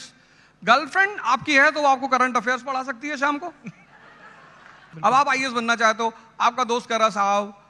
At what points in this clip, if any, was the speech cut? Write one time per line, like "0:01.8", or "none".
0:04.8